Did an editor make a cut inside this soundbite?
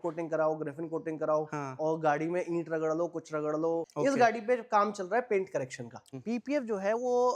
yes; 2 cuts; at 3.9 s, 6.0 s

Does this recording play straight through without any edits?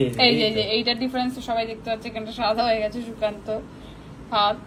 yes; 0 cuts

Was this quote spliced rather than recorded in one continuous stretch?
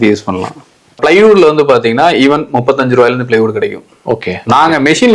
yes; 1 cut; at 1.0 s

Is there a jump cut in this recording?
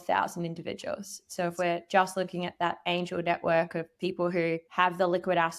yes; 1 cut; at 4.7 s

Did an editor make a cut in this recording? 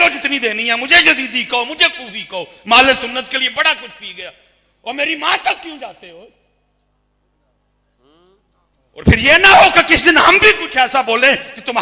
no; 0 cuts

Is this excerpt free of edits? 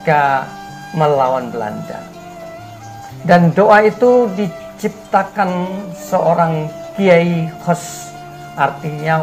yes; 0 cuts

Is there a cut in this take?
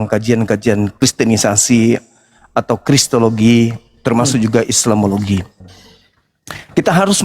yes; 1 cut; at 0.9 s

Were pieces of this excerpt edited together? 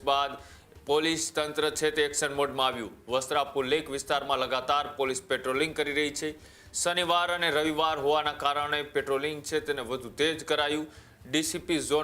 no; 0 cuts

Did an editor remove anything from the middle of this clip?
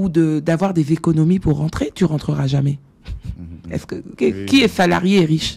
yes; 1 cut; at 4.1 s

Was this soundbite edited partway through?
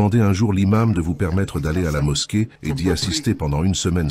no; 0 cuts

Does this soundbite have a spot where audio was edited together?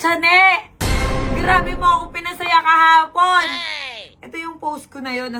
no; 0 cuts

